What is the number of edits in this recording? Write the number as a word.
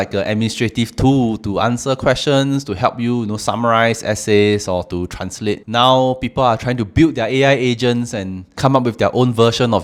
zero